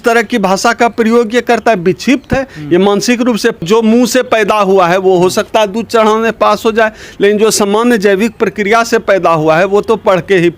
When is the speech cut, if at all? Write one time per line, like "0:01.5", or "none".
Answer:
0:03.6